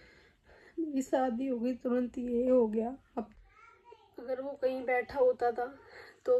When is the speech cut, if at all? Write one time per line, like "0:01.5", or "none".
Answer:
0:03.3